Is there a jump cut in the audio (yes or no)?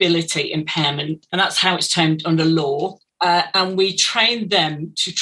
yes